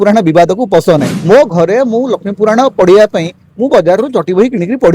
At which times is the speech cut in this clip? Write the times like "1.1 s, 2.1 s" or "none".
1.1 s